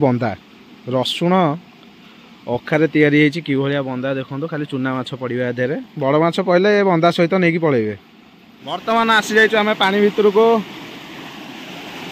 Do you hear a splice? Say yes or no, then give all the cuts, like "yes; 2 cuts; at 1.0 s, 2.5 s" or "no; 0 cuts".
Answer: yes; 1 cut; at 8.8 s